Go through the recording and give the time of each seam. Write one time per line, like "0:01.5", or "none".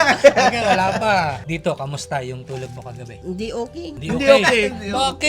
0:01.4
0:03.1
0:04.0